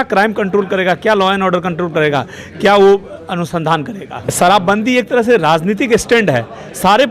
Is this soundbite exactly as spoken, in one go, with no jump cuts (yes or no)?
no